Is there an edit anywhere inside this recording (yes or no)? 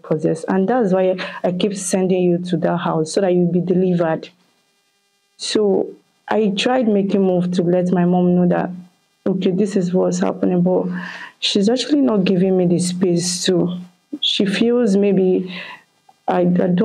no